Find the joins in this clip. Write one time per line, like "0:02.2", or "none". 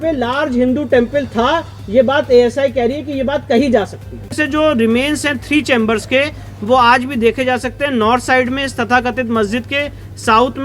0:04.4